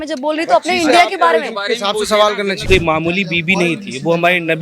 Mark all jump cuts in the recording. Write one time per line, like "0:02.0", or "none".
0:02.6